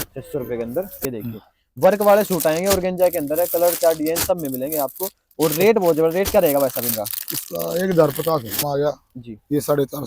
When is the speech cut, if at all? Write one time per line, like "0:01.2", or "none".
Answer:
0:01.0
0:08.6

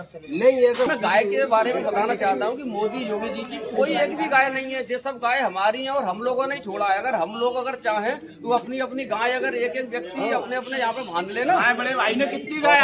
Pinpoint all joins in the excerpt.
0:00.9

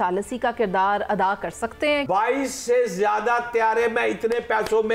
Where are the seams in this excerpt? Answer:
0:02.0

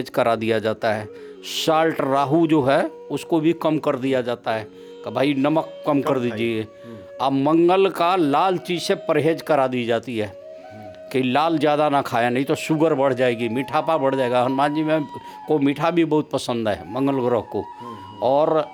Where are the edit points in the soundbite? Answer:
none

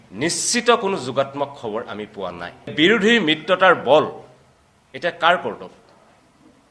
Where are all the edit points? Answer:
0:02.7

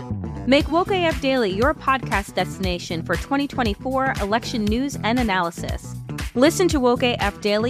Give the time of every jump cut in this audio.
none

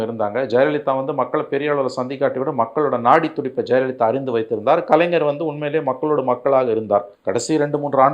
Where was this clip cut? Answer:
0:07.2

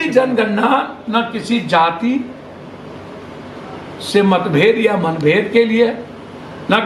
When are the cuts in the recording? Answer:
none

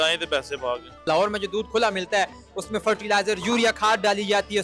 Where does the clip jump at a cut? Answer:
0:01.0

